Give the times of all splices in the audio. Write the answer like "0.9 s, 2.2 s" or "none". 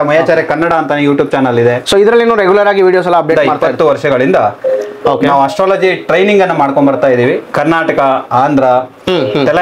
3.4 s